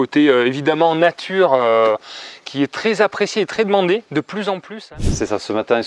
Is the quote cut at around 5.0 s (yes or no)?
yes